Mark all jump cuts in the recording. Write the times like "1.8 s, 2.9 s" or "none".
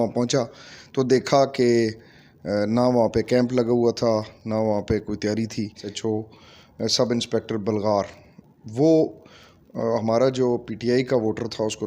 5.9 s